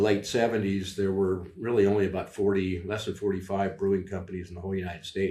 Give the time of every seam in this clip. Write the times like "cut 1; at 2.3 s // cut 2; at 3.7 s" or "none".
none